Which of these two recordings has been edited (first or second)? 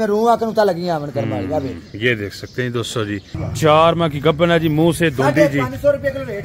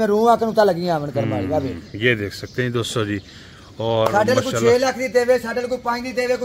first